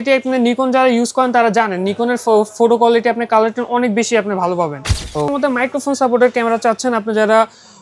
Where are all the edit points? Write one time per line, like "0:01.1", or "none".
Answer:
0:05.3